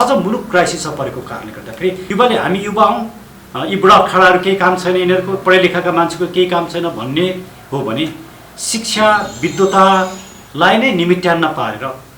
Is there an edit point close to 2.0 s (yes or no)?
yes